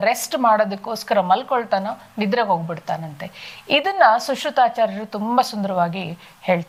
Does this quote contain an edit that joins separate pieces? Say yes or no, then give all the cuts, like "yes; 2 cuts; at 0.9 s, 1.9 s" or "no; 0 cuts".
no; 0 cuts